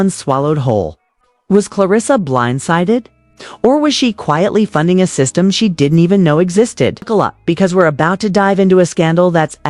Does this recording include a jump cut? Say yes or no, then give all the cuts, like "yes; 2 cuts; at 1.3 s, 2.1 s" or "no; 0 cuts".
yes; 1 cut; at 7.1 s